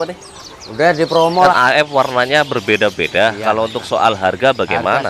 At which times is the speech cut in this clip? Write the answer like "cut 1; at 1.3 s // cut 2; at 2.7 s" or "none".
cut 1; at 1.4 s